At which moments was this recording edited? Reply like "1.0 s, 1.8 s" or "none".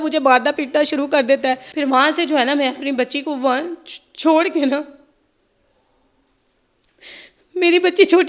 1.7 s

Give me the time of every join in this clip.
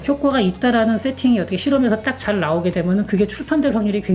none

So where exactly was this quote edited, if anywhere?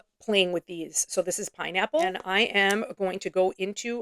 2.2 s

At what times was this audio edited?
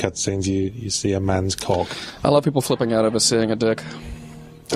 3.4 s

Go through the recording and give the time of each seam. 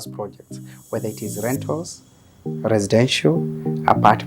none

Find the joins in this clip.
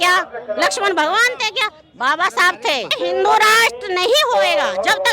2.9 s

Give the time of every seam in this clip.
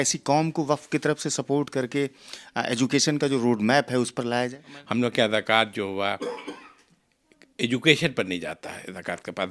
4.7 s

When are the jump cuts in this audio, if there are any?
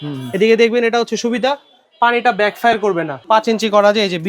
3.2 s

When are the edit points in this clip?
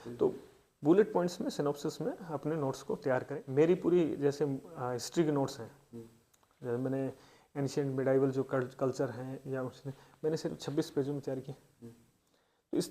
3.4 s

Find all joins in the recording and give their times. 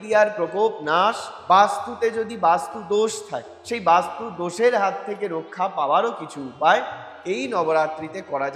1.3 s

